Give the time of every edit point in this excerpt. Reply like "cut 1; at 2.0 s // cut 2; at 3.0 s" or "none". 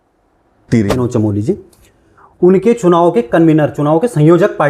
cut 1; at 1.1 s